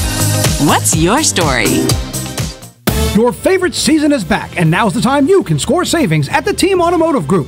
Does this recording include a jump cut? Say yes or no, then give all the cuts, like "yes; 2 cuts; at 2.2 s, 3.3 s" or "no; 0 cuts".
yes; 1 cut; at 2.6 s